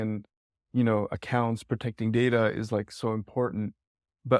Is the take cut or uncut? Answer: uncut